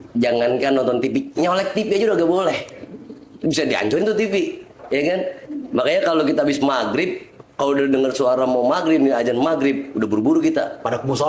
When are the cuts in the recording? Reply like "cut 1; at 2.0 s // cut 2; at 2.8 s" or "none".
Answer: none